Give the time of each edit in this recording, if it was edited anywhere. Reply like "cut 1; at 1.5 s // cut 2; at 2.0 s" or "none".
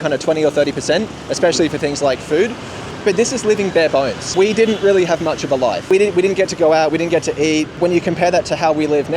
cut 1; at 2.9 s // cut 2; at 4.2 s // cut 3; at 5.8 s // cut 4; at 7.8 s